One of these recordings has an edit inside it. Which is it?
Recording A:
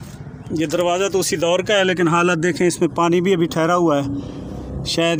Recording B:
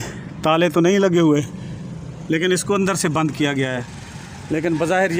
B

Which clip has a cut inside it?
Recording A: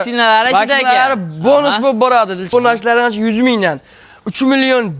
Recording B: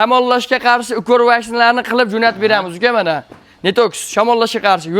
A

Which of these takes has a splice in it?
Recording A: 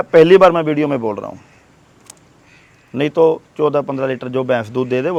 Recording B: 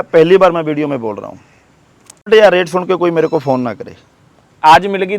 B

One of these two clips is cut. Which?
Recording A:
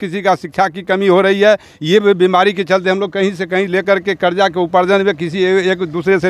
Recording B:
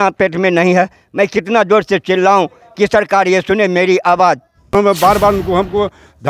B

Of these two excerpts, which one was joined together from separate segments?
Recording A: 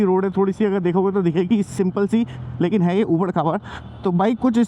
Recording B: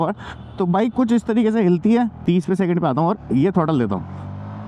B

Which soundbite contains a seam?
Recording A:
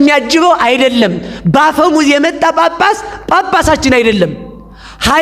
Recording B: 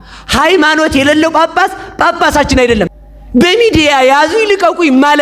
B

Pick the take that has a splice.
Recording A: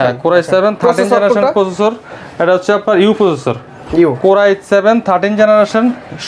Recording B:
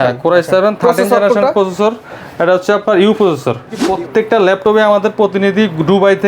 B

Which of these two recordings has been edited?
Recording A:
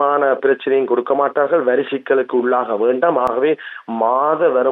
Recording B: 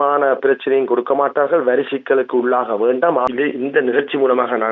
B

